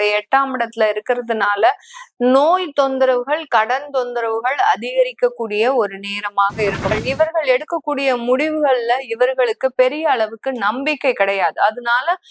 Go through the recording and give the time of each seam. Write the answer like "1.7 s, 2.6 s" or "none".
6.9 s